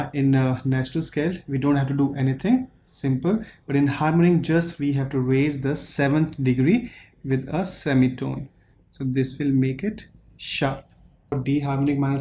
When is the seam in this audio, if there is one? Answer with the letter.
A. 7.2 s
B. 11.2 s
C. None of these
B